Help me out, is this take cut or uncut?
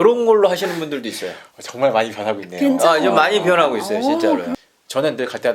cut